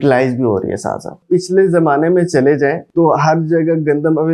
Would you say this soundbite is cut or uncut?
cut